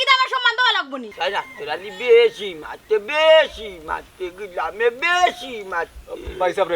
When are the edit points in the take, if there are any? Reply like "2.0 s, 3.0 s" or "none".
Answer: 1.0 s